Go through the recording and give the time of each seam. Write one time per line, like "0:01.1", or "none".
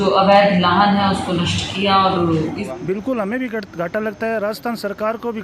0:02.6